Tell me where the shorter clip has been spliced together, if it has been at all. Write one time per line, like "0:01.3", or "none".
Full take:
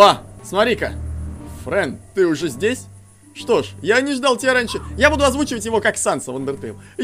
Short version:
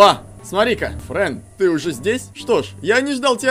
0:01.0
0:02.3